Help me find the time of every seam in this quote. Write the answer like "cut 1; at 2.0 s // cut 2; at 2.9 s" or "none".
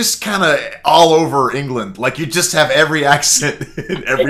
none